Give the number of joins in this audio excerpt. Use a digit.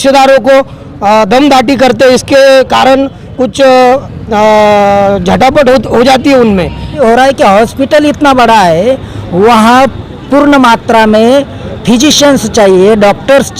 1